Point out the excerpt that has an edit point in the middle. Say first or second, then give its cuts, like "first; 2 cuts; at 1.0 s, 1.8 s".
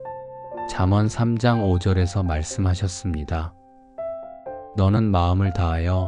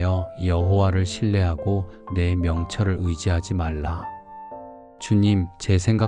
first; 2 cuts; at 3.6 s, 4.7 s